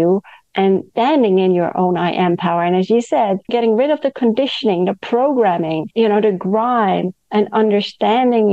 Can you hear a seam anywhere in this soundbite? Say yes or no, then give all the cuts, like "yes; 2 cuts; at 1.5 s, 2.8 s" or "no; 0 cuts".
yes; 3 cuts; at 0.9 s, 3.5 s, 5.8 s